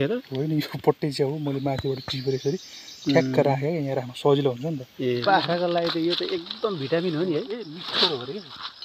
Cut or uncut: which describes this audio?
cut